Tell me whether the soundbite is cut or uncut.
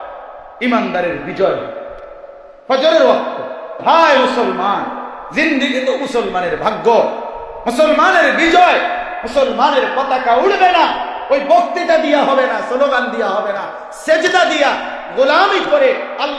cut